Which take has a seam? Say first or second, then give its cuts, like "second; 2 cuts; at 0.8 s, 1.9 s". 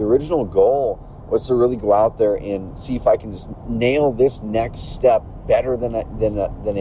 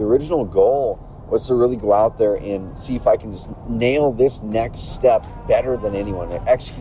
second; 1 cut; at 5.8 s